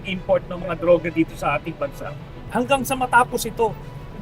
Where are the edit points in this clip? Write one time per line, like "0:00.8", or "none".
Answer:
0:02.5